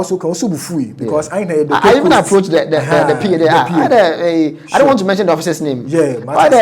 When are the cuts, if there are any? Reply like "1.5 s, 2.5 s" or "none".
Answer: none